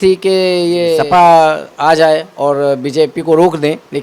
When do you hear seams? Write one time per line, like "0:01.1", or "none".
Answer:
0:01.0